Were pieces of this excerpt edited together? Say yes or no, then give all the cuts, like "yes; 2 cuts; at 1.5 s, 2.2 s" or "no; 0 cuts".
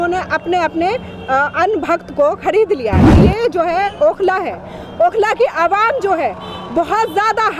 yes; 1 cut; at 3.1 s